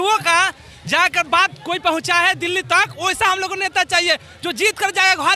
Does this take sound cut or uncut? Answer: uncut